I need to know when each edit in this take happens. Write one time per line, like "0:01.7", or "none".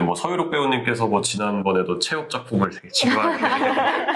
none